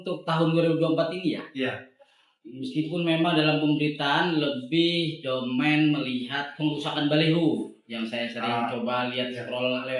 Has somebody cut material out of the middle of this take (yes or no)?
no